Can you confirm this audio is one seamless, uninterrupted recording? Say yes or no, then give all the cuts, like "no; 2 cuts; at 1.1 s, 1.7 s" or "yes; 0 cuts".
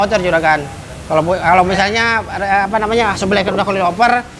yes; 0 cuts